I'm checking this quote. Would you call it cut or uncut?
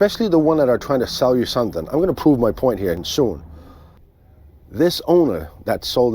cut